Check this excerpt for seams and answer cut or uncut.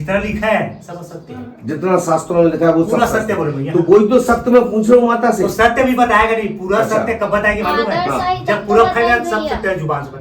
uncut